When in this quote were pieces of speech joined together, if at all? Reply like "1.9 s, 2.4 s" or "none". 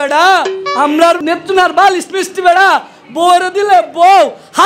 1.2 s